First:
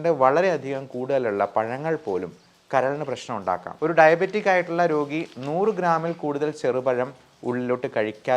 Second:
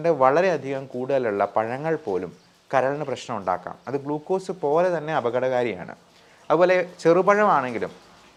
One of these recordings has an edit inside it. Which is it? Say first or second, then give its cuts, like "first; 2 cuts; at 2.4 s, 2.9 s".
first; 1 cut; at 3.7 s